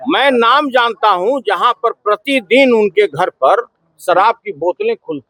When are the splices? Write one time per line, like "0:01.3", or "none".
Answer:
none